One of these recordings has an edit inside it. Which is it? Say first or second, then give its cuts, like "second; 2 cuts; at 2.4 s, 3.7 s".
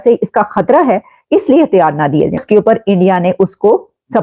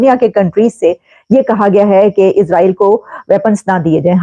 first; 1 cut; at 2.4 s